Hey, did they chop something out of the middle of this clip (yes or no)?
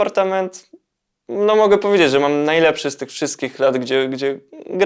no